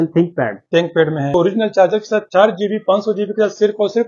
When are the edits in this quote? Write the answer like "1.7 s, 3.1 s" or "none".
1.3 s